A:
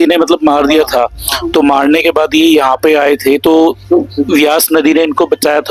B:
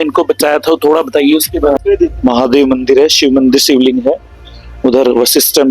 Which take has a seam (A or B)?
B